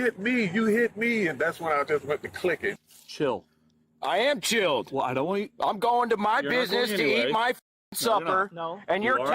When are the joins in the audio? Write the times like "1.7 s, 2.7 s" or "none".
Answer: 2.8 s